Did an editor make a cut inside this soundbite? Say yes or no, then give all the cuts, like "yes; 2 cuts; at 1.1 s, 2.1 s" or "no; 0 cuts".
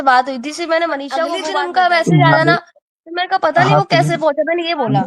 yes; 1 cut; at 1.4 s